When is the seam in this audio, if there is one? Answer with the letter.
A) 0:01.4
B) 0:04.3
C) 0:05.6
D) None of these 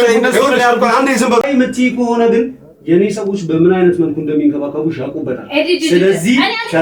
A